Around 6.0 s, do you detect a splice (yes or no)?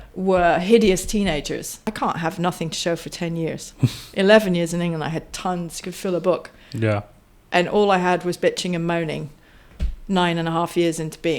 no